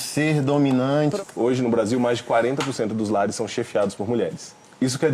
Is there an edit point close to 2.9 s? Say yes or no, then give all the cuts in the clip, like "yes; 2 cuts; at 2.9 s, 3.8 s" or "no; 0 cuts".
no; 1 cut; at 1.1 s